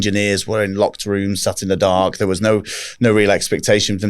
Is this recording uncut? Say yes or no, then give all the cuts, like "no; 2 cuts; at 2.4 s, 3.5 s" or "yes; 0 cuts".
yes; 0 cuts